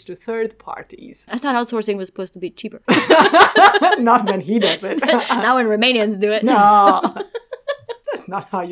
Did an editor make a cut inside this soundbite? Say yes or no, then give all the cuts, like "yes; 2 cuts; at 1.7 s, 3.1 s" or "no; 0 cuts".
no; 0 cuts